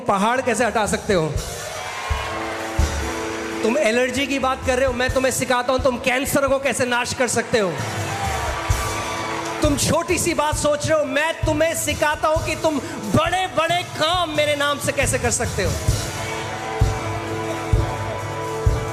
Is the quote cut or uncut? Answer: uncut